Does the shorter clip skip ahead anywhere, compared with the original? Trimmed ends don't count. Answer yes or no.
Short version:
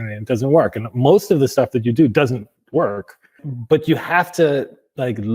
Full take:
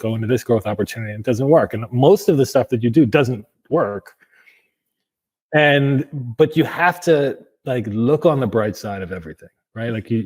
yes